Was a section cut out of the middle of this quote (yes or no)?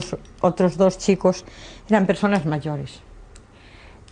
no